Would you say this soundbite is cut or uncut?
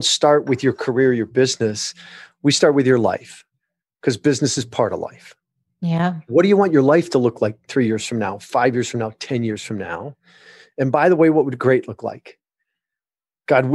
uncut